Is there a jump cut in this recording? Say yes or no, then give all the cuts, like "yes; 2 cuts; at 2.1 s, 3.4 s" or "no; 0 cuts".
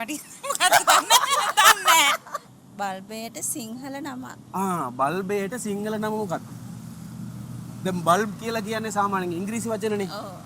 yes; 1 cut; at 2.6 s